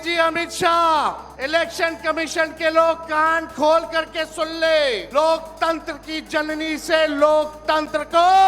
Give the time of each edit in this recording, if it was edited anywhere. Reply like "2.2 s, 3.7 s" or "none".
1.3 s, 5.0 s